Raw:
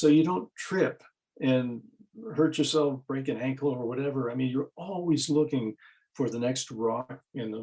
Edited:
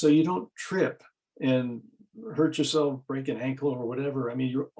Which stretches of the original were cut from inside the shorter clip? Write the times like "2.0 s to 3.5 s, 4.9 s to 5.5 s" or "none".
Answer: none